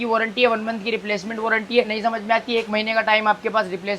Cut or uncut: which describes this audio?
cut